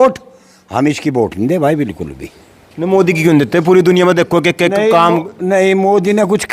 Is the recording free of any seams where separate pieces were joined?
yes; 0 cuts

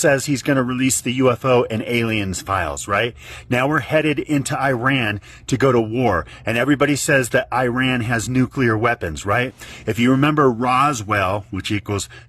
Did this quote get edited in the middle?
no; 0 cuts

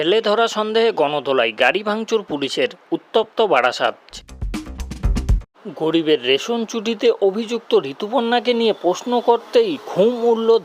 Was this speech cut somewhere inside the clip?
yes; 2 cuts; at 4.1 s, 5.5 s

